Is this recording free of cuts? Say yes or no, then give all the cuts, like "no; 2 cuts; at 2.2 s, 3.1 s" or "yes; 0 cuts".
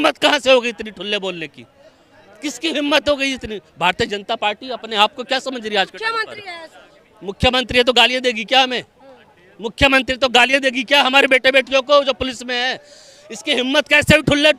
yes; 0 cuts